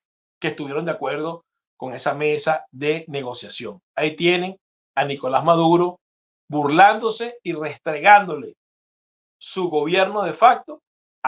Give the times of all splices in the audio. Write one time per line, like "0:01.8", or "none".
none